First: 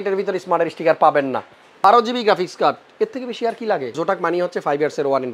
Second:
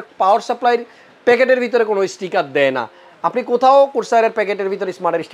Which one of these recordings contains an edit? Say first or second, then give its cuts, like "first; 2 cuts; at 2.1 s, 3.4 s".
first; 2 cuts; at 1.8 s, 4.0 s